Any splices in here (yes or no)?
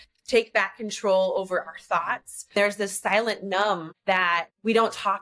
yes